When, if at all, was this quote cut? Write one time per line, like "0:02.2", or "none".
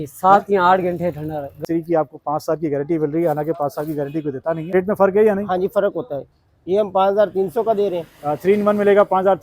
0:01.5
0:04.7